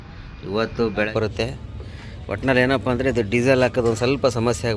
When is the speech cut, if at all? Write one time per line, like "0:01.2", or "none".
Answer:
0:01.1